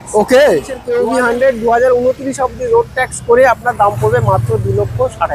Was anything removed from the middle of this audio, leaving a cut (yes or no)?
yes